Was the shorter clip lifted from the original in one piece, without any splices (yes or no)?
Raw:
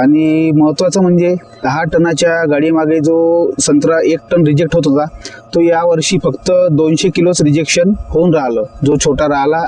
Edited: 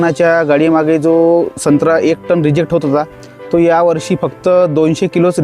yes